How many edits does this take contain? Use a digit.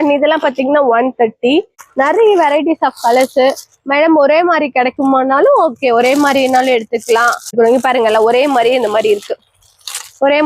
2